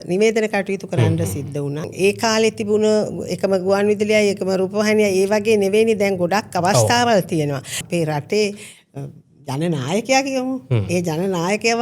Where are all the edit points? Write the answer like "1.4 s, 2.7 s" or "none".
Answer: 1.9 s, 7.8 s